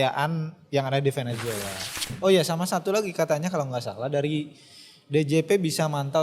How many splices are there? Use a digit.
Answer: 1